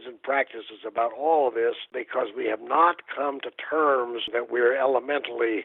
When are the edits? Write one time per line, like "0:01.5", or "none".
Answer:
0:01.9
0:04.3